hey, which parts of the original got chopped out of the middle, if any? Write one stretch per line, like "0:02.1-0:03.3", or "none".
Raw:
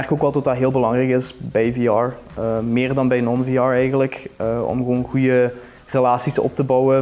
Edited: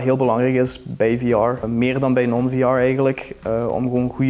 0:02.2-0:02.6

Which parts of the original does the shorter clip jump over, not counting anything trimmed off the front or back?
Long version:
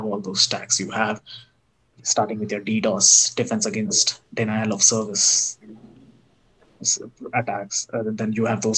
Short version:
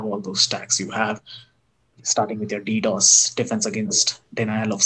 none

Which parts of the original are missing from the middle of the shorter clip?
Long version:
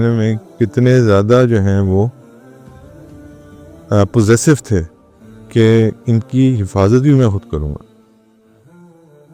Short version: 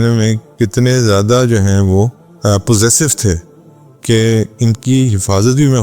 0:02.2-0:03.7

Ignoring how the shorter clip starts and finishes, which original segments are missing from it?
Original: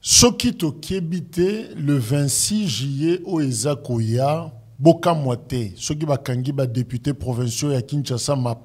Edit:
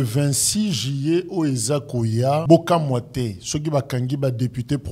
0:04.4-0:04.8

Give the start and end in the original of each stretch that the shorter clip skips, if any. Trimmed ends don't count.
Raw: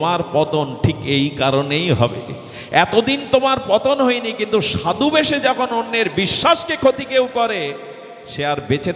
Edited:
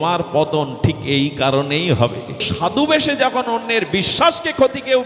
0:02.5-0:04.7

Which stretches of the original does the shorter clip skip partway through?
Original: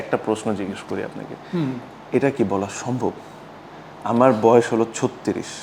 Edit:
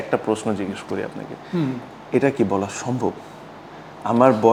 none

